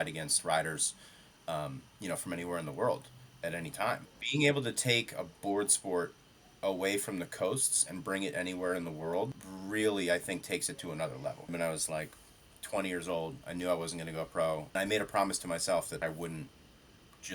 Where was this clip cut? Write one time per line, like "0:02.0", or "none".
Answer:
0:04.1
0:09.5
0:11.5
0:14.7
0:16.0